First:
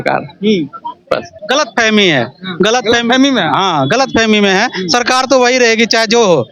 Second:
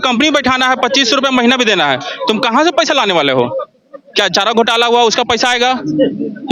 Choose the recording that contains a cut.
first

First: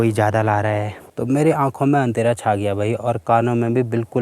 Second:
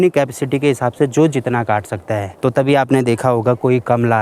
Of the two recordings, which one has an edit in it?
first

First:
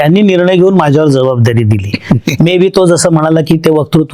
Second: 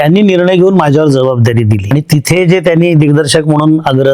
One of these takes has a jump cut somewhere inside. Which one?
second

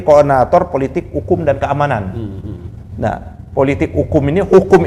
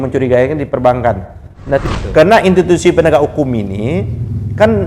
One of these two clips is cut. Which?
second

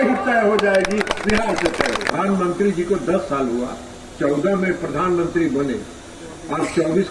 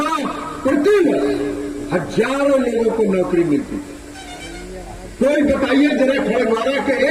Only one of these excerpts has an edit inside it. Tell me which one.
first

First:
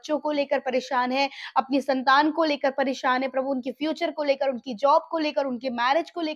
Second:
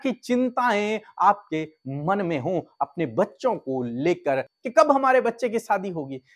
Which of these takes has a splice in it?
second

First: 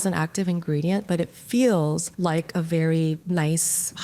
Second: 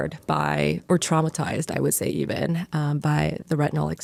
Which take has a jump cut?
first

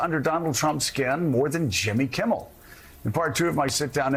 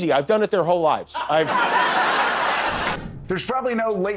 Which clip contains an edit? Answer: second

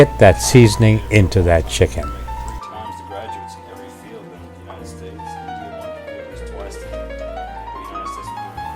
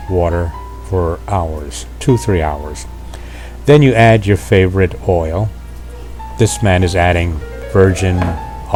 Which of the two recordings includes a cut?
first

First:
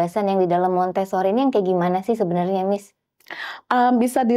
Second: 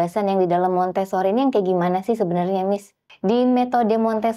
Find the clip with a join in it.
second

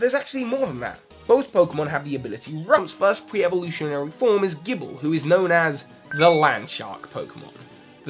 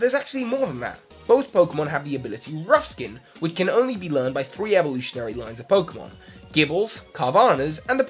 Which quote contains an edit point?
second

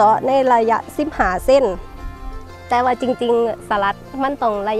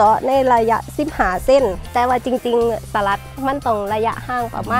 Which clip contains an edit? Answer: second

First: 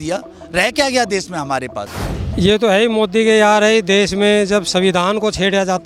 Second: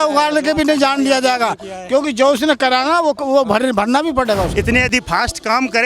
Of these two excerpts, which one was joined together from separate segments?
second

